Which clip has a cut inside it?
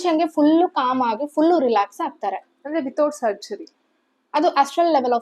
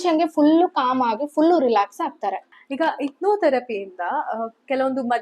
second; 1 cut; at 2.5 s

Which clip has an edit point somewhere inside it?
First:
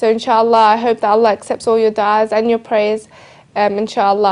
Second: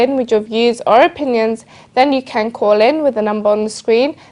second; 1 cut; at 1.0 s

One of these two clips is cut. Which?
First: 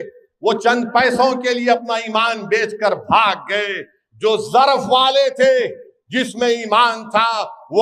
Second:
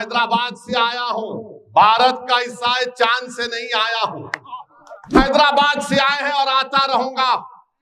second; 1 cut; at 5.1 s

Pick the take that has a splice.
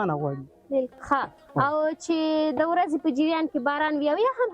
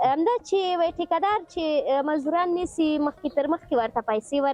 first; 1 cut; at 0.9 s

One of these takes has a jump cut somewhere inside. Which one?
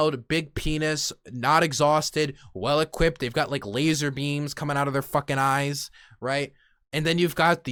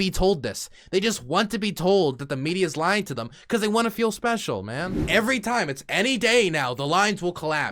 second; 1 cut; at 5.0 s

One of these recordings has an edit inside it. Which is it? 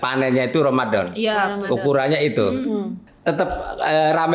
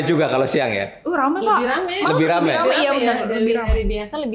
first; 1 cut; at 3.0 s

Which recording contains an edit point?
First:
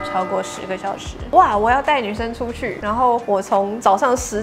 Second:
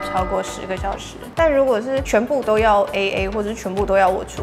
second; 1 cut; at 1.2 s

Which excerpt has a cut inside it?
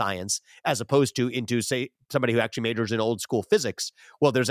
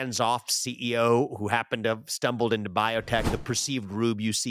second; 1 cut; at 3.3 s

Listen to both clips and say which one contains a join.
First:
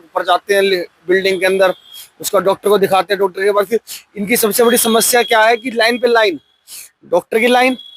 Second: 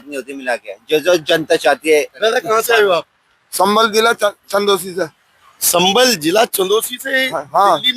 second; 1 cut; at 2.1 s

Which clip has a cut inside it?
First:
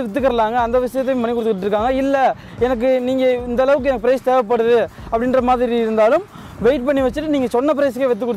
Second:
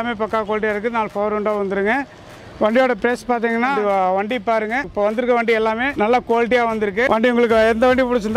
second; 4 cuts; at 3.8 s, 4.9 s, 5.9 s, 7.1 s

